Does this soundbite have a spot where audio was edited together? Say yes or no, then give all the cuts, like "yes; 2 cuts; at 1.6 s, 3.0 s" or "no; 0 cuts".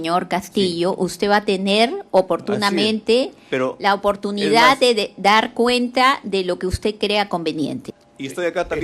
yes; 1 cut; at 7.8 s